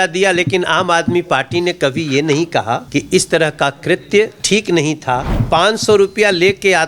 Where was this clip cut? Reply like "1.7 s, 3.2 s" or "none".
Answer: 2.8 s, 4.4 s, 5.3 s